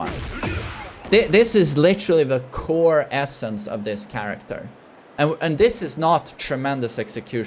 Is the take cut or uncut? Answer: uncut